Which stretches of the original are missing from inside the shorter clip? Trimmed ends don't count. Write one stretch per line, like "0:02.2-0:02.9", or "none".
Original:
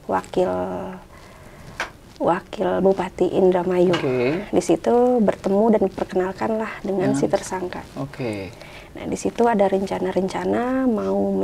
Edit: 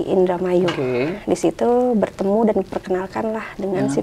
none